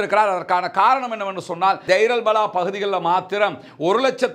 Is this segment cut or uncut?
cut